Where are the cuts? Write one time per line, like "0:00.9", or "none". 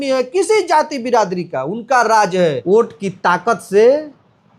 0:02.6